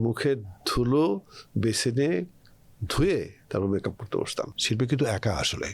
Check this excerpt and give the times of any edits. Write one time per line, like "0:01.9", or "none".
0:04.6